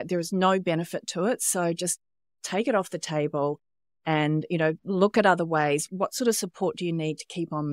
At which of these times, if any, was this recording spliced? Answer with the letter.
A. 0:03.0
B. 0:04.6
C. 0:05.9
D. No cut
C